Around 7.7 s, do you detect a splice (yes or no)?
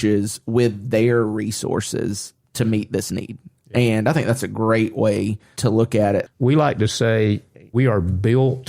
yes